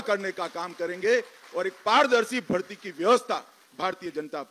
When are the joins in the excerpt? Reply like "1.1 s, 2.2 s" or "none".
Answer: none